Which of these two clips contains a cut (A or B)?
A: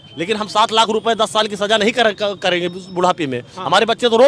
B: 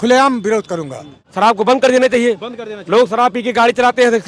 B